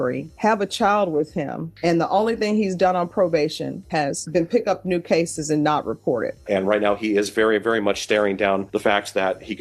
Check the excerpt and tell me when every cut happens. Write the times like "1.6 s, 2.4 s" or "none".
3.9 s, 6.4 s

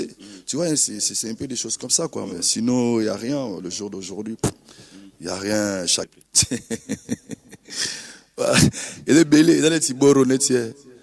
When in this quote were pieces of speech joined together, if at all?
6.1 s

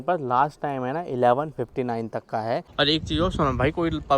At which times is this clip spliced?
2.7 s

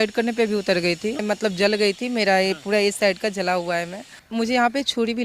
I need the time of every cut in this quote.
1.2 s, 4.2 s

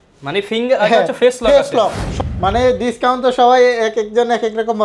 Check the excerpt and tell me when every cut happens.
2.0 s

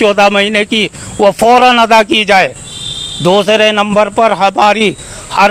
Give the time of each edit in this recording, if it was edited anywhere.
none

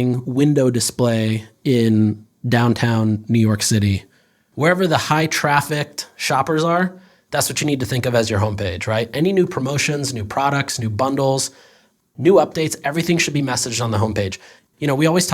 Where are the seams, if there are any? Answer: 4.4 s

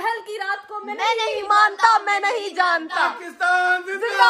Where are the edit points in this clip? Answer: none

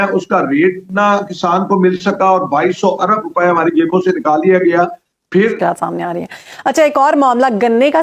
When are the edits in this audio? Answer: 5.3 s

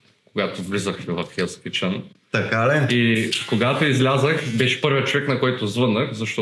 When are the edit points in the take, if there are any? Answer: none

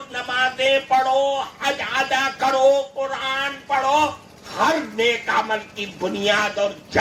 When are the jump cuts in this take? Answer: none

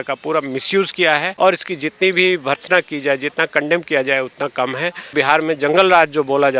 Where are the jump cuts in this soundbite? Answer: 1.3 s, 5.1 s

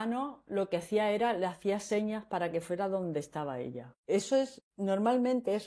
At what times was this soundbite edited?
3.9 s, 4.6 s

